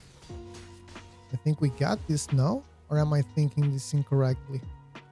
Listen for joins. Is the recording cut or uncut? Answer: cut